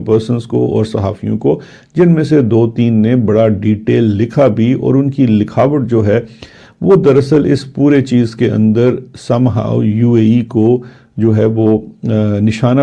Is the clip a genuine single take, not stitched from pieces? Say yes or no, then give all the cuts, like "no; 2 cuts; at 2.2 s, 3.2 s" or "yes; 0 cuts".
yes; 0 cuts